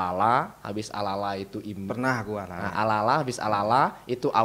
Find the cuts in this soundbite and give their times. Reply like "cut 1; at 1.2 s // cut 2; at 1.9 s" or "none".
none